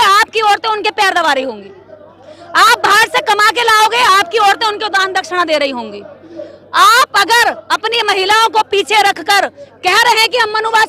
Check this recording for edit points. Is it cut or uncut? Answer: uncut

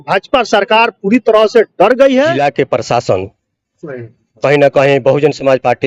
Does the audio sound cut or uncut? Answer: cut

